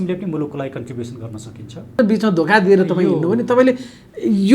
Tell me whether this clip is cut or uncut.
cut